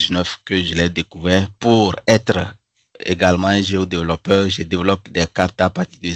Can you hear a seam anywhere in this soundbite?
no; 0 cuts

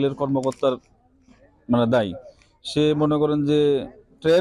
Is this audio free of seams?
yes; 0 cuts

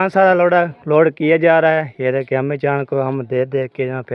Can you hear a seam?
no; 0 cuts

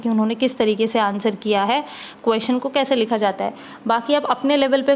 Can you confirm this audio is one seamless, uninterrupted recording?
yes; 0 cuts

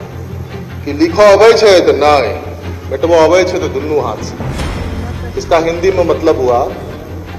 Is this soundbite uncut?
yes; 0 cuts

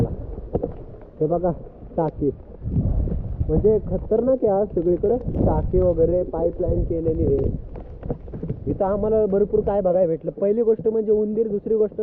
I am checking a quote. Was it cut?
no; 0 cuts

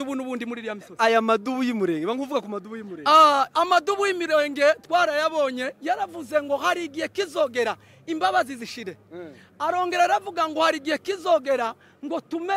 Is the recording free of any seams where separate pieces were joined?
yes; 0 cuts

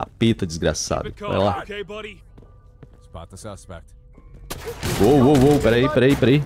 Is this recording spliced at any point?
yes; 1 cut; at 5.0 s

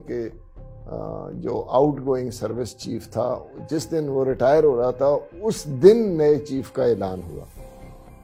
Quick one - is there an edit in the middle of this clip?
no; 0 cuts

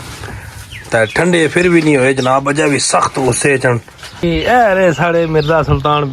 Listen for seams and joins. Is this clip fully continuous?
no; 1 cut; at 4.2 s

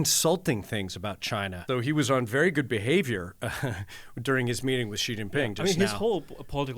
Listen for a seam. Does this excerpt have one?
yes; 1 cut; at 1.6 s

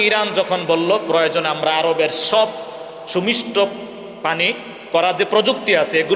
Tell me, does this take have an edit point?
no; 0 cuts

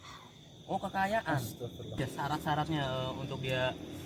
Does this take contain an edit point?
yes; 1 cut; at 2.0 s

